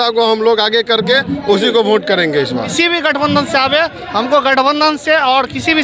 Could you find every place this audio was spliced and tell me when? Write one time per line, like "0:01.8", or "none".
0:02.7